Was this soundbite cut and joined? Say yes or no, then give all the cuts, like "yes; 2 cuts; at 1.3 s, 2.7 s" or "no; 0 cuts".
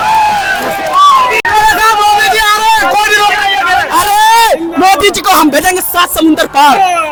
no; 0 cuts